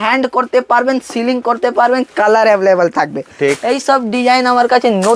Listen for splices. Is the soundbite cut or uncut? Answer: uncut